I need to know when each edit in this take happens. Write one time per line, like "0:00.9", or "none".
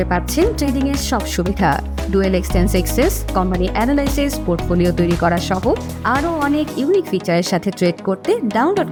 none